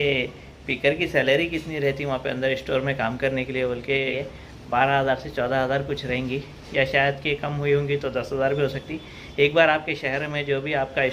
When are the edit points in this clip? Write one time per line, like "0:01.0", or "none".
none